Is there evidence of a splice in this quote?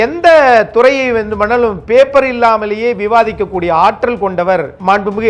no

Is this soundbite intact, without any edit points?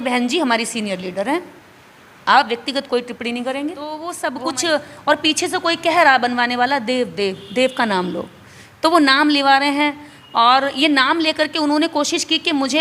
no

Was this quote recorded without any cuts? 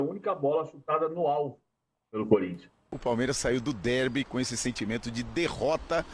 no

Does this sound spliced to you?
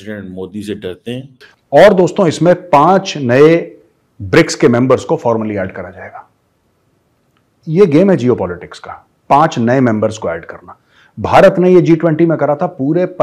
yes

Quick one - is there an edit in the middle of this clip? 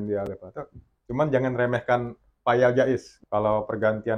yes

